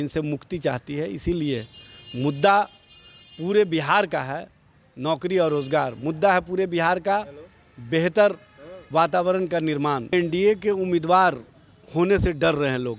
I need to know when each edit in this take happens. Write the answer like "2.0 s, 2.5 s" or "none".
10.1 s